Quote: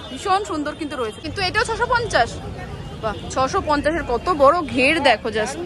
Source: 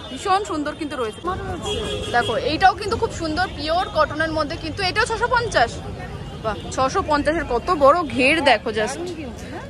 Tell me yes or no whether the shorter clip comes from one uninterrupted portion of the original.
no